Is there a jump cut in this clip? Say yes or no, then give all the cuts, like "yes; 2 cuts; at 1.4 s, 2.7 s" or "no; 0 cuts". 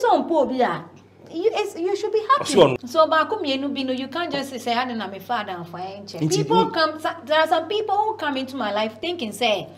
yes; 1 cut; at 2.8 s